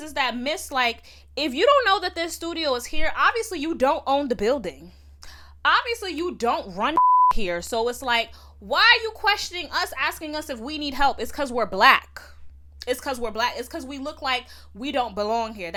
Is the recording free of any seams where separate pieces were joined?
yes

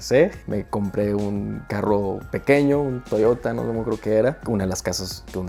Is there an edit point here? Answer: no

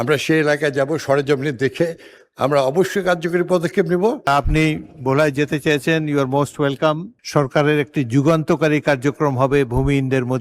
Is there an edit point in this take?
yes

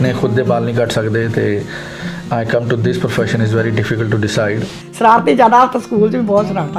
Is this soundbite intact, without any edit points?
no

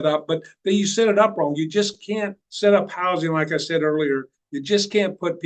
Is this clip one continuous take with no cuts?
no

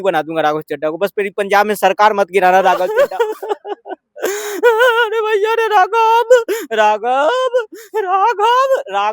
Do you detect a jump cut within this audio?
yes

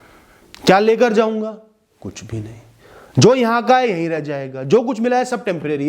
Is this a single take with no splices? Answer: yes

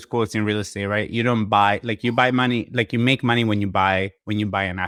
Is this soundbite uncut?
yes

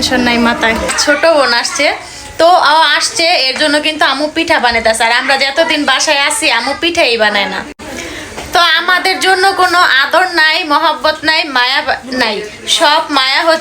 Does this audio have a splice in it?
yes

